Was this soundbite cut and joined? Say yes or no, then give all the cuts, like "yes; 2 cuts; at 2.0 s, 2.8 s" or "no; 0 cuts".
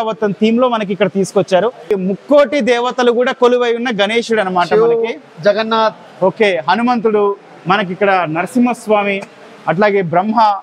yes; 1 cut; at 1.9 s